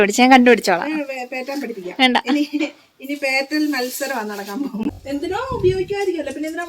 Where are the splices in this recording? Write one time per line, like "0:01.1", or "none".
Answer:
0:04.8